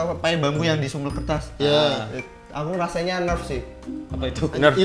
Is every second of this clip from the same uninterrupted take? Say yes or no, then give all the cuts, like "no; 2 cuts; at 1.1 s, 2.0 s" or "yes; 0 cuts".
yes; 0 cuts